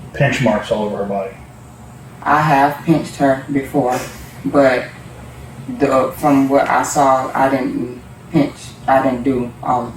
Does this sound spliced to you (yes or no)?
no